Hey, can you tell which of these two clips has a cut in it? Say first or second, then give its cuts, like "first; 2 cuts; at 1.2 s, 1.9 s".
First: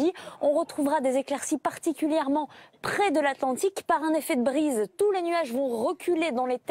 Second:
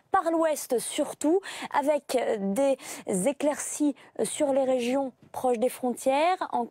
first; 1 cut; at 4.6 s